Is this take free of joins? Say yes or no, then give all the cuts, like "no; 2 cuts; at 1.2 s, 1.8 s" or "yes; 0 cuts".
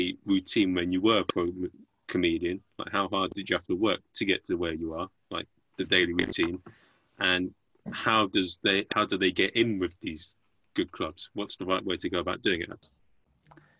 no; 1 cut; at 12.8 s